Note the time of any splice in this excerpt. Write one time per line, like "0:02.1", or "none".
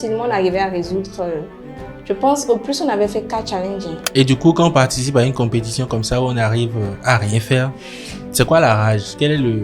0:04.0